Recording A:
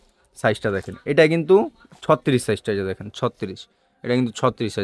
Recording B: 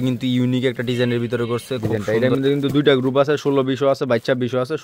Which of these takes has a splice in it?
B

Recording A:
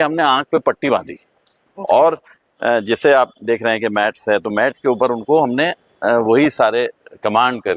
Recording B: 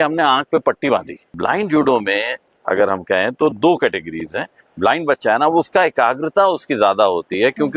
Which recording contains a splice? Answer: B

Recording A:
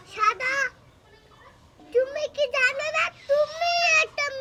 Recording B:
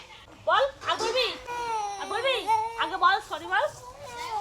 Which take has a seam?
B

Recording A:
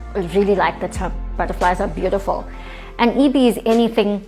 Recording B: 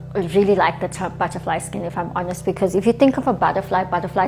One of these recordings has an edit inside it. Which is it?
A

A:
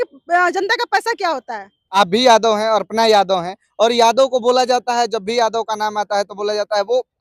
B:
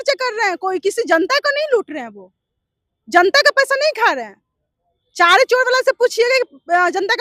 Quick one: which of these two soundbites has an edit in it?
A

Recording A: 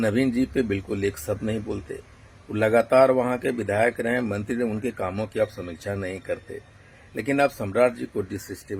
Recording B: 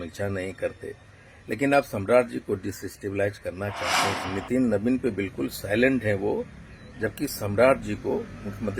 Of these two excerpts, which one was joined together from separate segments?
B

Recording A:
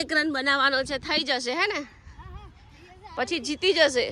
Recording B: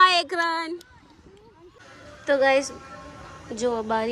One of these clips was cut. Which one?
B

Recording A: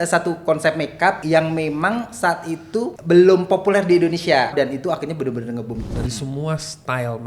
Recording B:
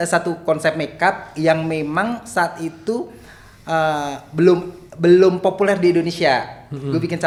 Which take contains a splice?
A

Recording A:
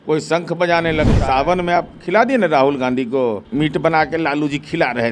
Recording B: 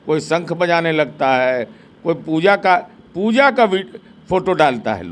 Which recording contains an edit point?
A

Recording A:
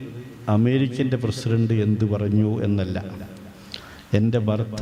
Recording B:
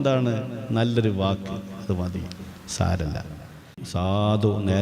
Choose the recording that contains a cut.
B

